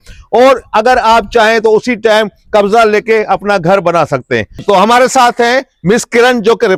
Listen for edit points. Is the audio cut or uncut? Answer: uncut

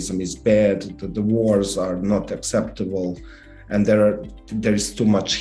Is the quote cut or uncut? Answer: uncut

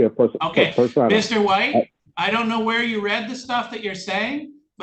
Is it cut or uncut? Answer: cut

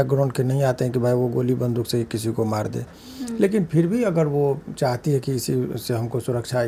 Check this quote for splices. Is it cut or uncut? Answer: uncut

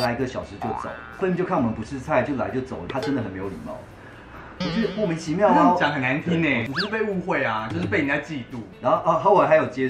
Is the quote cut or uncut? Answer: cut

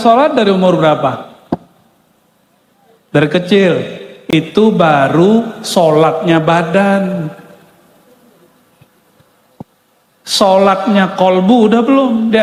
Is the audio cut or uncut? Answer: uncut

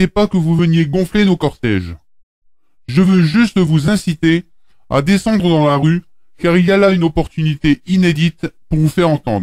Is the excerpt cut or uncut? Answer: uncut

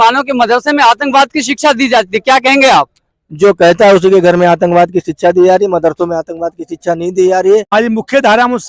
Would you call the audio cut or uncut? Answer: cut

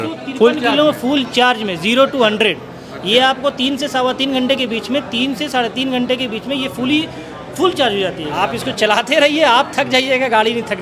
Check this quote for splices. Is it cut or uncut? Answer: cut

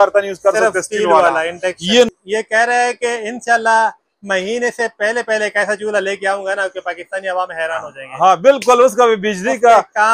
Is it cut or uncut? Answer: cut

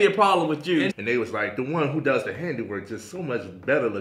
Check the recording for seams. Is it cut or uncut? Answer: cut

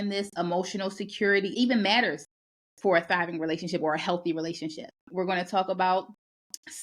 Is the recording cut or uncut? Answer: cut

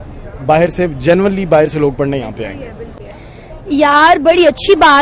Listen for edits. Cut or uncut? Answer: uncut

